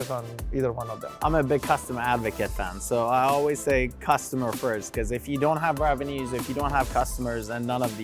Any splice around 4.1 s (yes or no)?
no